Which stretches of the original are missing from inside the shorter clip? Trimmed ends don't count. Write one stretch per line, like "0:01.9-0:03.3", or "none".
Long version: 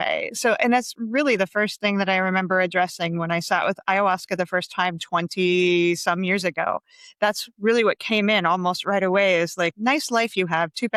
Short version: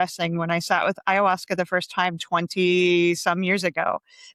none